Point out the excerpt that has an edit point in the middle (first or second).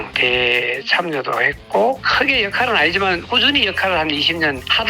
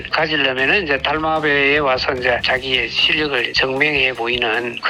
first